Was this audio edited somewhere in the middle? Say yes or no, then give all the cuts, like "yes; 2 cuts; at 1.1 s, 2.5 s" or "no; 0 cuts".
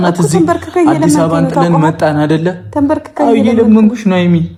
no; 0 cuts